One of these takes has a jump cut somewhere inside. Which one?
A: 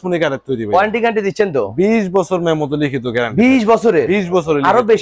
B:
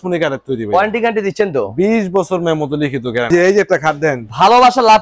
B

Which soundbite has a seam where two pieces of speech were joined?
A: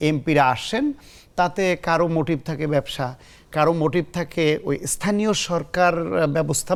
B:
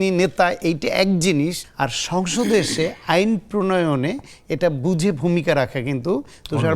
B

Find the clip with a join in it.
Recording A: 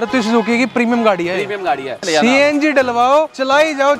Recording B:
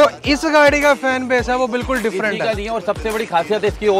A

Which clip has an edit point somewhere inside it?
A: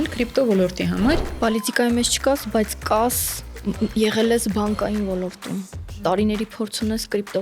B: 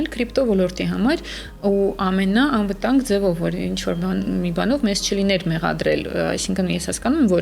A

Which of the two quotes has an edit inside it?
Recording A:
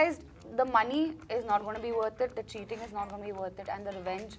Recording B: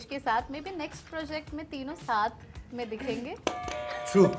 B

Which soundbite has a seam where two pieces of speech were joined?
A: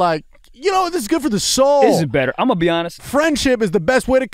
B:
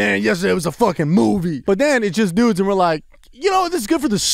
B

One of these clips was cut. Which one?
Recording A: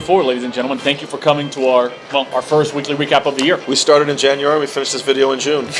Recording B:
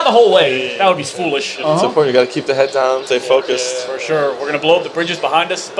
B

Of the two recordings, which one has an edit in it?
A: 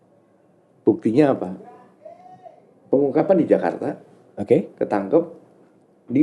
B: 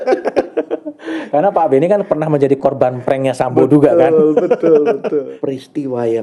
B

